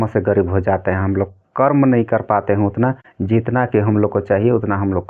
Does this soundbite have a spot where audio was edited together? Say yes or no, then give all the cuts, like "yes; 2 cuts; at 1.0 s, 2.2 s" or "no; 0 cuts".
no; 0 cuts